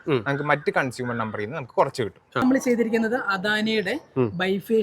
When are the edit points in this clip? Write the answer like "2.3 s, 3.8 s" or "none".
2.4 s